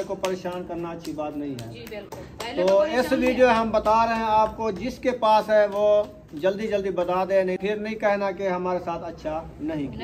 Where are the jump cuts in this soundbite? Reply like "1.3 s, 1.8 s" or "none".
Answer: 7.6 s

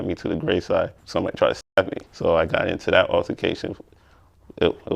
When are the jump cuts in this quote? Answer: 1.0 s

